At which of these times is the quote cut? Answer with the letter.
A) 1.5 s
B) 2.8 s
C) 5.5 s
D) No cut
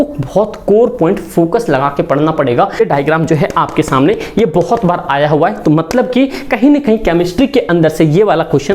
B